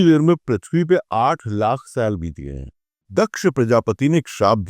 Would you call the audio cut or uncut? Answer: cut